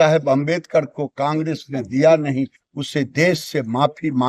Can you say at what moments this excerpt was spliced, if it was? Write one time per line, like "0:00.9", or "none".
none